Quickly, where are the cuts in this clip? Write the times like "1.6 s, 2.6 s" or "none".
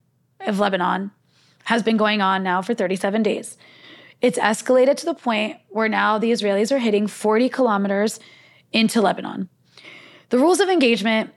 none